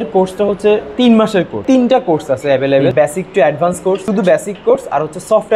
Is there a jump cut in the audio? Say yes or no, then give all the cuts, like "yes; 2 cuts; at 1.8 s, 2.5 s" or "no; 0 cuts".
yes; 3 cuts; at 1.5 s, 2.9 s, 4.0 s